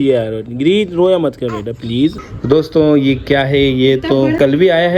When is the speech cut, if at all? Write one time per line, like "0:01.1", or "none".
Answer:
0:02.3